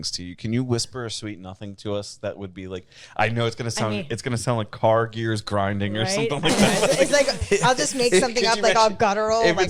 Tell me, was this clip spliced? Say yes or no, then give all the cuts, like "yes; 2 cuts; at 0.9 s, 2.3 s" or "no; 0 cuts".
no; 0 cuts